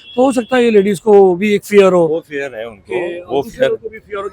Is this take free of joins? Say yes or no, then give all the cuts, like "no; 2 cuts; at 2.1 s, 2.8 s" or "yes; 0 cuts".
yes; 0 cuts